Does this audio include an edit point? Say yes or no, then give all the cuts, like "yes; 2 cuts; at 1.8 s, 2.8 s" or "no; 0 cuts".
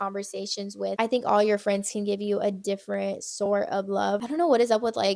yes; 2 cuts; at 1.0 s, 4.2 s